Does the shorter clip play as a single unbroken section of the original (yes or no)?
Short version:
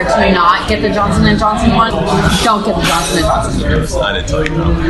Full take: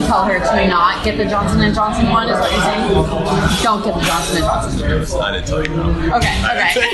no